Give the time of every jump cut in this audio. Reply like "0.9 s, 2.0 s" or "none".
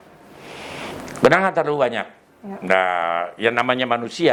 none